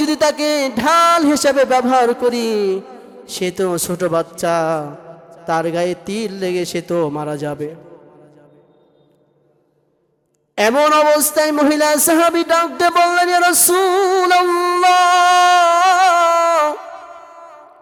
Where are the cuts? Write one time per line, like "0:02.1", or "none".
none